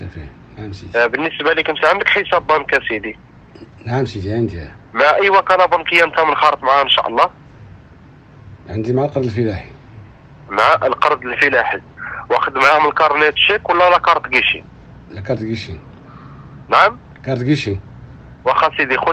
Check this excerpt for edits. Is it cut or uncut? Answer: uncut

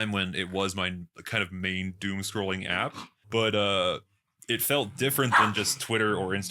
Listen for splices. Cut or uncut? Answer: cut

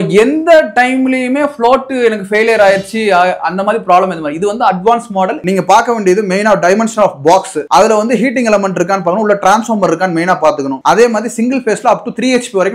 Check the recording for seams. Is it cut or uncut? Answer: cut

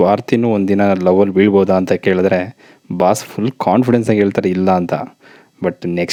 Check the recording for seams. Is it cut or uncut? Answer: uncut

